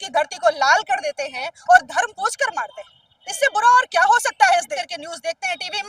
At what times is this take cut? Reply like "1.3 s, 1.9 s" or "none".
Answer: 4.7 s

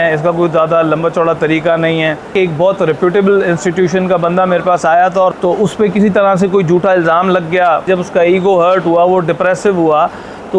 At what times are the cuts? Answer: 2.3 s, 5.3 s, 7.9 s

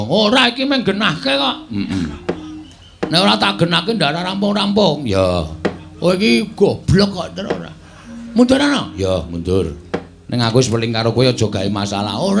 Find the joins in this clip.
none

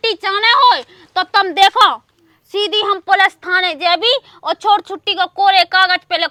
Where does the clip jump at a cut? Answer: none

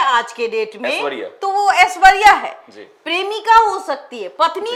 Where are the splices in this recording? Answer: none

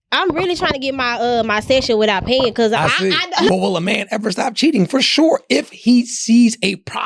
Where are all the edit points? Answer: 3.5 s

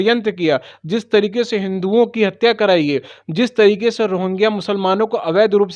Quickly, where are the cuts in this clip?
none

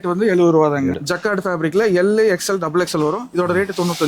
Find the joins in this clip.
1.0 s

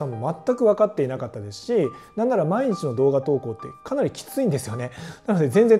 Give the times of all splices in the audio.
none

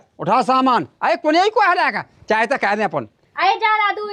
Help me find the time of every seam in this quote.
3.1 s

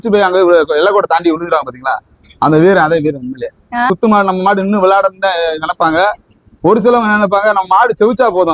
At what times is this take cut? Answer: 3.9 s

